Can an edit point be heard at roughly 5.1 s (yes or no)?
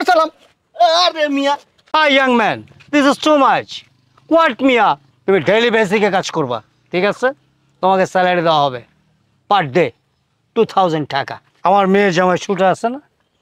yes